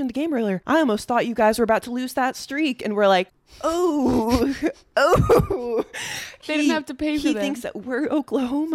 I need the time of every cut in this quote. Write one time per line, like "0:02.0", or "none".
0:03.4
0:06.4

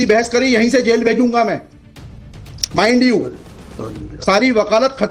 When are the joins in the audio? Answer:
none

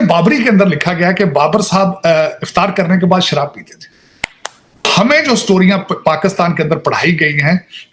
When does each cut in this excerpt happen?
0:04.8

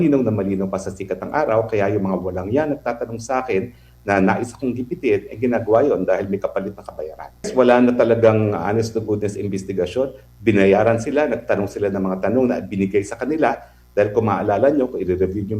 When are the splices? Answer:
0:07.5

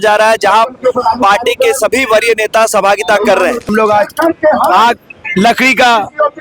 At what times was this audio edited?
0:03.7

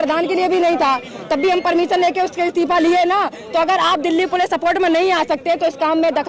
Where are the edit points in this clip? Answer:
none

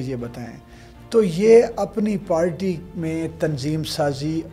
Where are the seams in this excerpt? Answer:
none

